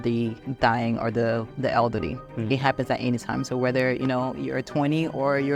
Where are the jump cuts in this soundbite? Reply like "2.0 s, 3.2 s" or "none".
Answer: none